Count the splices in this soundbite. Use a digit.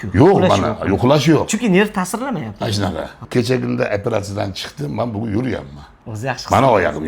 1